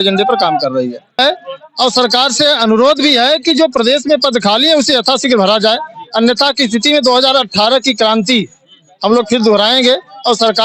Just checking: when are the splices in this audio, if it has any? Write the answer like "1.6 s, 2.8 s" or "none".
1.2 s